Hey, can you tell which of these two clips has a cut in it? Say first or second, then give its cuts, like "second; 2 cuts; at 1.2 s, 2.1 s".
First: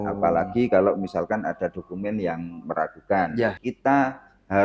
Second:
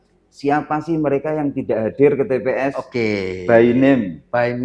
first; 1 cut; at 3.6 s